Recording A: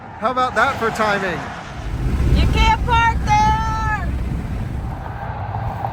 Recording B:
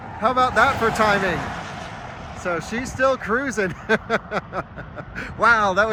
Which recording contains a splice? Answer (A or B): A